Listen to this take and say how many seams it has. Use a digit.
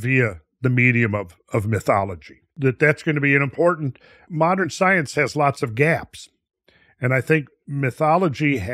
2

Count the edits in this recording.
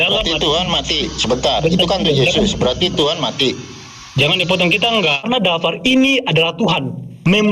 1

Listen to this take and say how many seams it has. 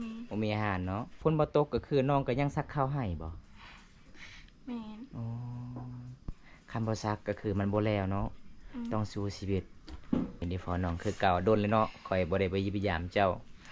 2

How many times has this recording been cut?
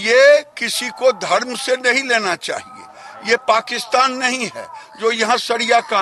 0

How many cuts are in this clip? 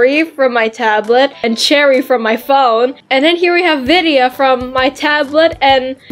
0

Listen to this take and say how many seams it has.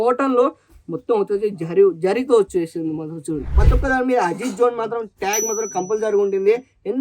1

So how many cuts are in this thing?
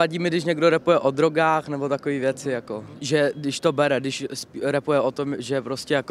0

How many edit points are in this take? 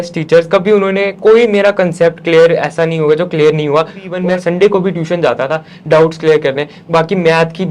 1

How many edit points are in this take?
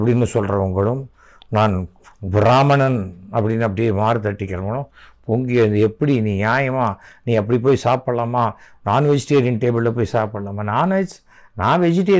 0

